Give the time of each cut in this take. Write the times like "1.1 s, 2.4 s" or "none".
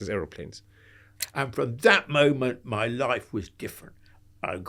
1.2 s